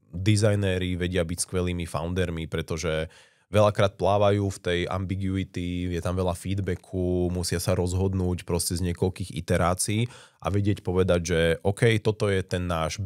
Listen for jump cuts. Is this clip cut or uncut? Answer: uncut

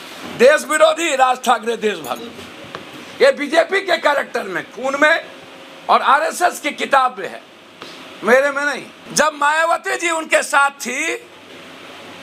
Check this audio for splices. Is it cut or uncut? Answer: uncut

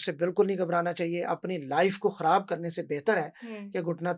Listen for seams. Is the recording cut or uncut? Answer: uncut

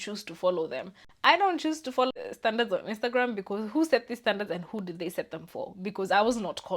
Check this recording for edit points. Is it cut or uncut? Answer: cut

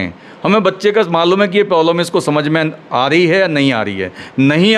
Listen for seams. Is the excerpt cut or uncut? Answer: uncut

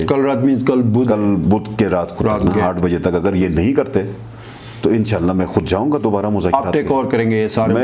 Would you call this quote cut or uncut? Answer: uncut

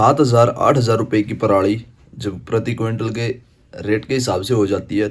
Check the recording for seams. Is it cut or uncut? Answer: uncut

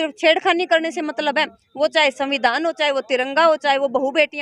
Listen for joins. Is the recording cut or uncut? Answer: uncut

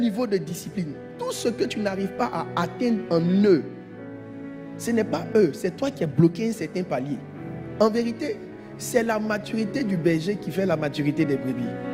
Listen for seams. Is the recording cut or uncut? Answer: cut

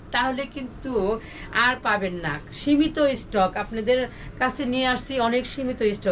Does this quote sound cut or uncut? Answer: uncut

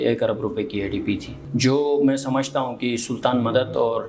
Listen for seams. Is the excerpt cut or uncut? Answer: uncut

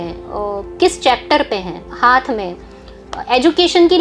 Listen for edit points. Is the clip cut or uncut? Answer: cut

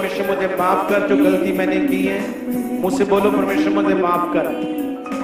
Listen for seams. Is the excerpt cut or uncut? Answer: uncut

